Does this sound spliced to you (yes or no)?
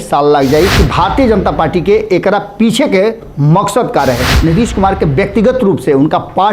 yes